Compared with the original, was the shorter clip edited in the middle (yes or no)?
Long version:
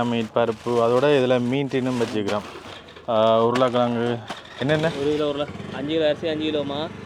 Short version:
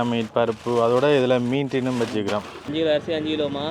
yes